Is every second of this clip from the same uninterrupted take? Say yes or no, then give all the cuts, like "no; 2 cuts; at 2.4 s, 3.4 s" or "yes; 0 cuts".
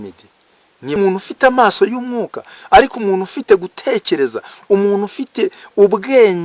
no; 1 cut; at 1.0 s